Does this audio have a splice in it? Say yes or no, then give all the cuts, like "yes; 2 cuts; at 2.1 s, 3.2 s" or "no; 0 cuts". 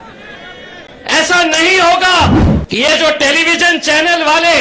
yes; 1 cut; at 2.5 s